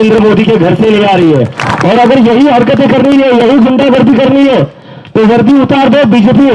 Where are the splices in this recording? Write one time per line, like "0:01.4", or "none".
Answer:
0:01.6